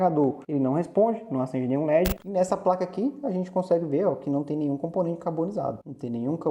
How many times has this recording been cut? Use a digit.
1